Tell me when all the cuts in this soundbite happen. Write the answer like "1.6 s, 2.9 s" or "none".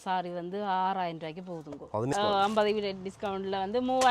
2.1 s